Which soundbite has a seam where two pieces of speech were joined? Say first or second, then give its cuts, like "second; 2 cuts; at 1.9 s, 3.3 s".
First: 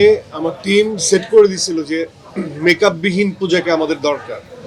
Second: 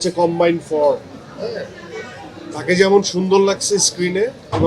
second; 1 cut; at 2.3 s